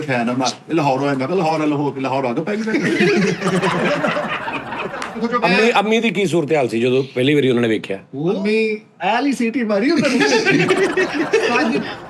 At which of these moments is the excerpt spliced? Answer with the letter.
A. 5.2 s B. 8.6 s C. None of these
A